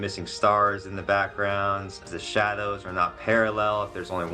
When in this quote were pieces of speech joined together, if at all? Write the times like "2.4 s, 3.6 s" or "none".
2.0 s